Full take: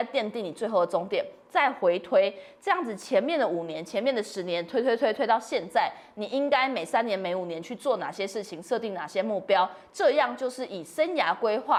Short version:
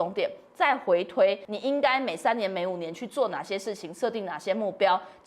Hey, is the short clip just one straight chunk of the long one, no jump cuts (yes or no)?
no